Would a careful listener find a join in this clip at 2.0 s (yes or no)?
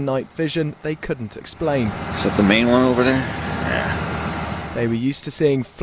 no